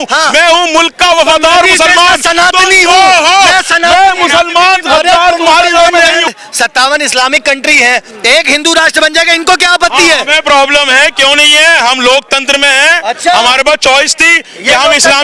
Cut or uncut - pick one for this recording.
cut